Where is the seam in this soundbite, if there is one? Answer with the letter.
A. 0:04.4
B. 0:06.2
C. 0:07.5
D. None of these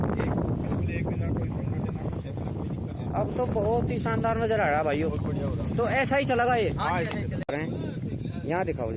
C